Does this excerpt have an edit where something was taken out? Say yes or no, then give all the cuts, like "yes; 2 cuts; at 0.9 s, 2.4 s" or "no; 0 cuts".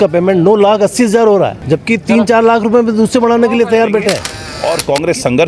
yes; 2 cuts; at 1.6 s, 4.3 s